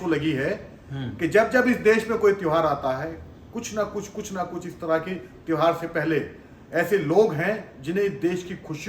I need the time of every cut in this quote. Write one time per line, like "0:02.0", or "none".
none